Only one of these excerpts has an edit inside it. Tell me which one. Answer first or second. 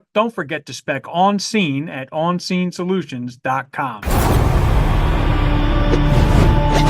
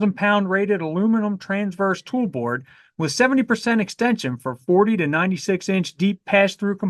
first